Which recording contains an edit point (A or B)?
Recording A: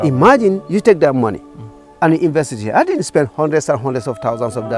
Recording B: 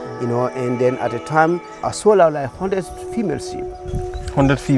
B